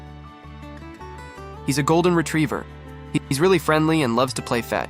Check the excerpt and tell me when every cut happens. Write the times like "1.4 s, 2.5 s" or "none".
1.6 s